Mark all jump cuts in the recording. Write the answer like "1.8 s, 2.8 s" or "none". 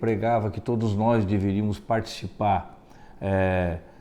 none